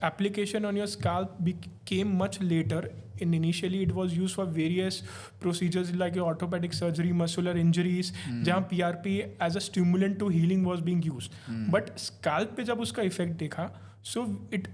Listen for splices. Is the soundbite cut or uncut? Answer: uncut